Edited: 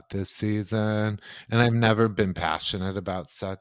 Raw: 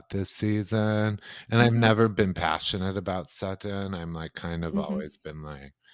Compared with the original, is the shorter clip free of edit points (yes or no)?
yes